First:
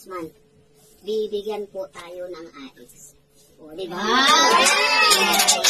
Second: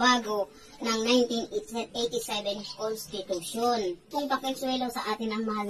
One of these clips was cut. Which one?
second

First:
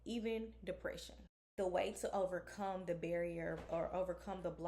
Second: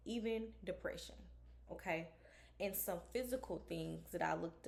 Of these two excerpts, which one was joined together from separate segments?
first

